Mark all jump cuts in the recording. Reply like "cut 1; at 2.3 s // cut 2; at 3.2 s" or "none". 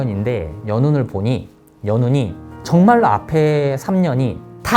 none